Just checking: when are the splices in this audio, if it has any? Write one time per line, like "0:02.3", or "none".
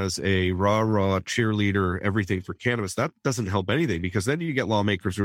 none